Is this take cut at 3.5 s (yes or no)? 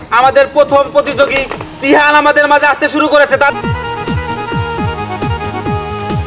yes